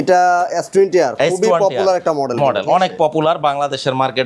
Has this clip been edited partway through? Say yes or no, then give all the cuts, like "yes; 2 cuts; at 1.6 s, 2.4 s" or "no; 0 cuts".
no; 0 cuts